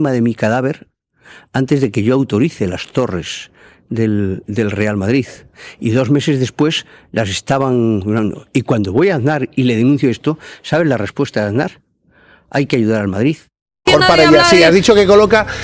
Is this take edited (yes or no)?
yes